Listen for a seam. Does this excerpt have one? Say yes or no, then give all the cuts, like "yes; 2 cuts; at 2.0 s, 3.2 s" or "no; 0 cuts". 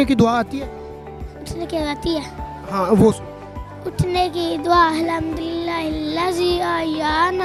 no; 0 cuts